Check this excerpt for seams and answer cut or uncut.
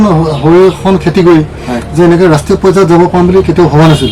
uncut